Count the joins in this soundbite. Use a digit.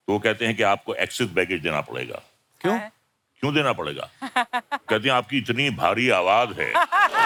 0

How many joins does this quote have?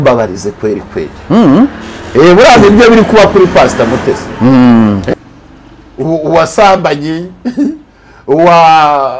1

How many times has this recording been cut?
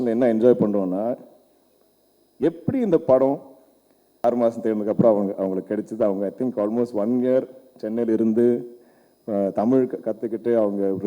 1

